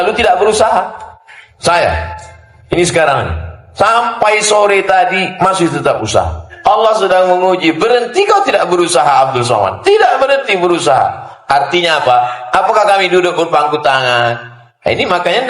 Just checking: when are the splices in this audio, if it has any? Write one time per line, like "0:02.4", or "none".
0:06.4
0:11.3